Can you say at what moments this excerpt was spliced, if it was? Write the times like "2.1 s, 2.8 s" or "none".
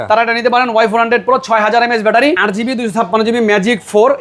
2.4 s